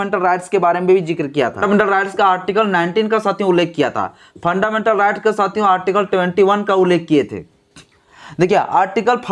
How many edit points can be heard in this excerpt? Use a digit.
1